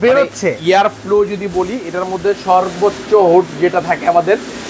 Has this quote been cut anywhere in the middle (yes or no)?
no